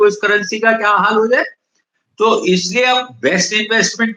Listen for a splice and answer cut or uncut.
uncut